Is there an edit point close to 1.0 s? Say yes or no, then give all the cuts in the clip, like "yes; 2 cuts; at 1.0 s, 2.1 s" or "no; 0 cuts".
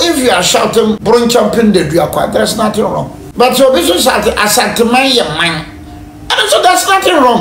yes; 2 cuts; at 1.0 s, 3.2 s